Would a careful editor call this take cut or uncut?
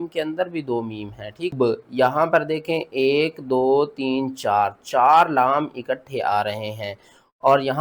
cut